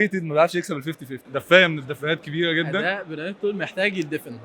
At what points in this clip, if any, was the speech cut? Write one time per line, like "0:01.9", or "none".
0:01.2